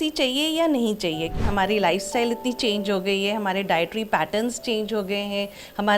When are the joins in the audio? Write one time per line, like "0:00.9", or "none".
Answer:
0:01.4